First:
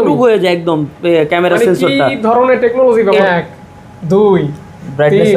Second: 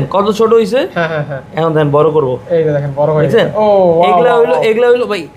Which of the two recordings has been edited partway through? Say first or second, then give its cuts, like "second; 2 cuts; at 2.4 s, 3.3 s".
first; 1 cut; at 3.2 s